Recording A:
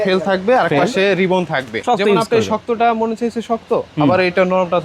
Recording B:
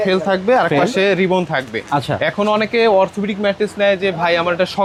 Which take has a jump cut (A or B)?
A